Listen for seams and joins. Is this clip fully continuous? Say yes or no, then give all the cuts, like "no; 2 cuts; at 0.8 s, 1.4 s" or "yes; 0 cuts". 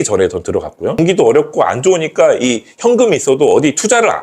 no; 1 cut; at 1.0 s